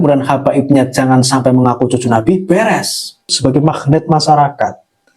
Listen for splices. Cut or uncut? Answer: cut